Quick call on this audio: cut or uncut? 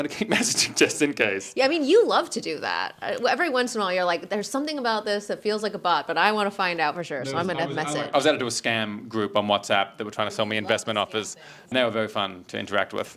cut